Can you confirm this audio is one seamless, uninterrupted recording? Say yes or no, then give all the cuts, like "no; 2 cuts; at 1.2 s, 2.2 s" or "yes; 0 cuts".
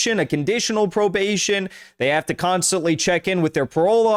yes; 0 cuts